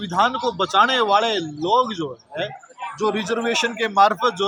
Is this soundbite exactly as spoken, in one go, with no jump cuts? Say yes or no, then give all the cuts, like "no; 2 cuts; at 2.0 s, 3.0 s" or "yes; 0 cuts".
yes; 0 cuts